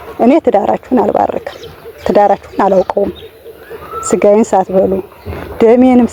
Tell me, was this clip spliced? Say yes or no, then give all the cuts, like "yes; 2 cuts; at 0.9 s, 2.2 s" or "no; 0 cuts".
no; 0 cuts